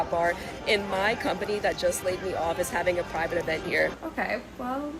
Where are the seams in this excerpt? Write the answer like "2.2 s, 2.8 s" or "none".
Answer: 4.0 s